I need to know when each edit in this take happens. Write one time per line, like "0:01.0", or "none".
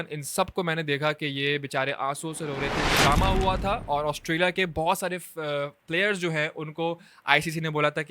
0:02.9